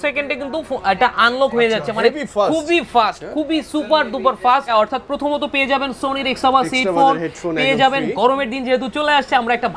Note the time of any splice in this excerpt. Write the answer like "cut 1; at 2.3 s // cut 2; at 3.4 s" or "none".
cut 1; at 4.7 s